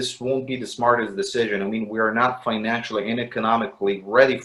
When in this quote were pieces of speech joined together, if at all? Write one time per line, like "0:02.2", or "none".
none